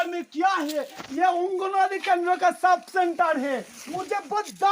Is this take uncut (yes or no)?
no